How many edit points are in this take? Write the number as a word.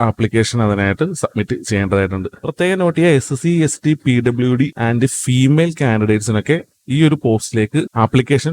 one